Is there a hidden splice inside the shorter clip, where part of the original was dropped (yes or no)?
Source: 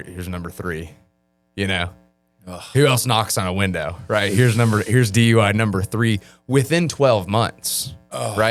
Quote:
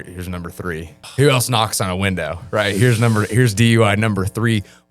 yes